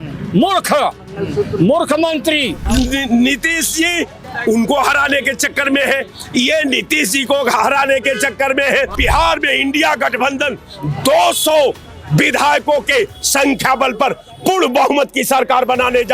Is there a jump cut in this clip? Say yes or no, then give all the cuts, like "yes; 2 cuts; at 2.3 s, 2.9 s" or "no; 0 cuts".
yes; 3 cuts; at 2.6 s, 4.2 s, 9.0 s